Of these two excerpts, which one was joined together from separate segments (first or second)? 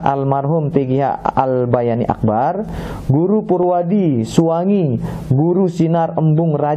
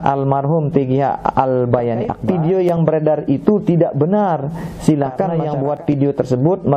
second